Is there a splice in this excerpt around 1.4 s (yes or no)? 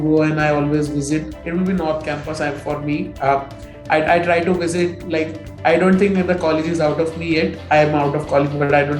yes